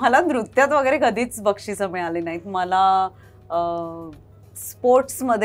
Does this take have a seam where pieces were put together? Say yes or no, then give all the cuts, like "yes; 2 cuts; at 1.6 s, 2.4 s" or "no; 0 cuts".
no; 0 cuts